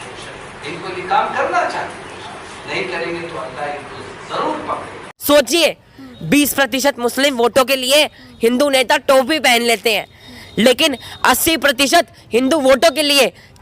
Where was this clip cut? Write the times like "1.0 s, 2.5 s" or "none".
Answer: 5.1 s